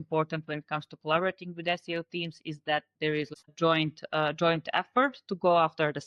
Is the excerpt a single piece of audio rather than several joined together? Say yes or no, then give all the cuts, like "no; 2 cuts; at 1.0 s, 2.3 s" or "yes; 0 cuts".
no; 1 cut; at 3.3 s